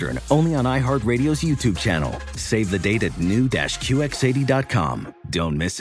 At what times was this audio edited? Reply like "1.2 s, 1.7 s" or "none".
none